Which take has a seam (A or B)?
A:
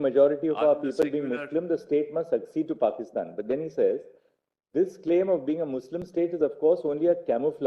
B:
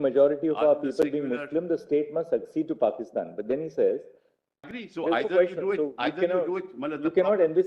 B